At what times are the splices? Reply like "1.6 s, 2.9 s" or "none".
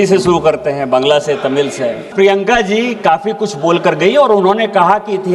2.1 s